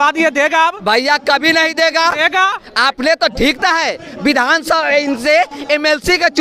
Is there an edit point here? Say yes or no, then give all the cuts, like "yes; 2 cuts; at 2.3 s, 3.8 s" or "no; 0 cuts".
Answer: no; 0 cuts